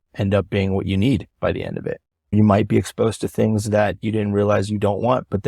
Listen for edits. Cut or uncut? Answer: cut